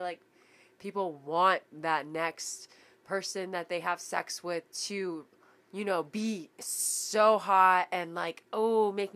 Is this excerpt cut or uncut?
uncut